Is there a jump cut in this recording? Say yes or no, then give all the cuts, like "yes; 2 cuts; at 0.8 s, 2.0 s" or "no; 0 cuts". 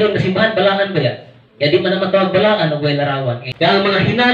yes; 1 cut; at 3.4 s